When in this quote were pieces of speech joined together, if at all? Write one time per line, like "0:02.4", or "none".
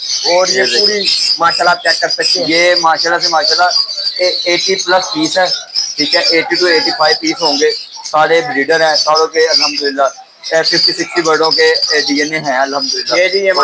none